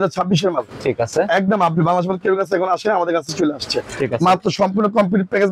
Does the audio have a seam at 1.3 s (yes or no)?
no